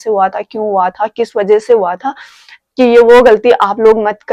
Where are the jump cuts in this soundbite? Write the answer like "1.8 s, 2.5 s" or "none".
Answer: none